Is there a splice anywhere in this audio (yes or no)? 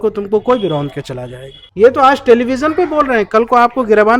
yes